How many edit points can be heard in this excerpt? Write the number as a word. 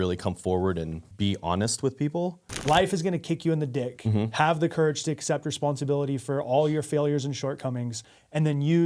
two